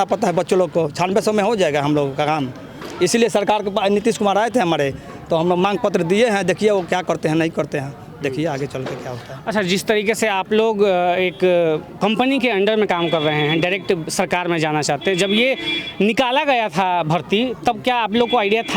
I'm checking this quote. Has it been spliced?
no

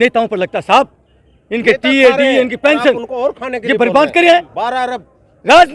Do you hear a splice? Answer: no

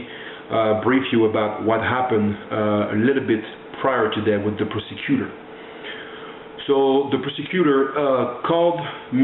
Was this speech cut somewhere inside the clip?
yes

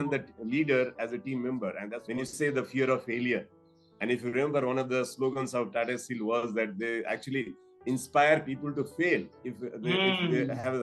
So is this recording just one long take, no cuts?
no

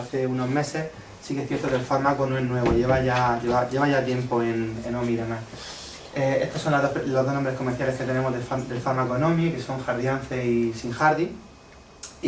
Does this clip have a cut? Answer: yes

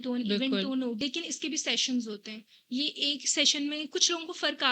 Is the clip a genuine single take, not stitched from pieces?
no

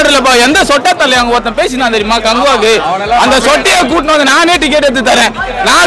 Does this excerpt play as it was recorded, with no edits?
yes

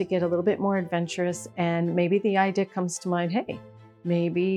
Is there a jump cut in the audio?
no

